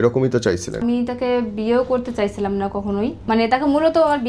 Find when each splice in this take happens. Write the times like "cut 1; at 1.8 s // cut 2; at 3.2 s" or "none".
cut 1; at 0.8 s // cut 2; at 3.2 s